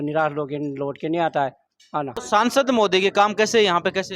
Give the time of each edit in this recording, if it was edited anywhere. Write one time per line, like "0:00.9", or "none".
0:02.2